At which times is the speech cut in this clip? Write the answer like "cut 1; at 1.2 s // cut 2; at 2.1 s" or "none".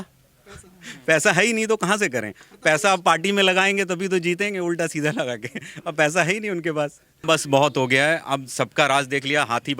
cut 1; at 7.1 s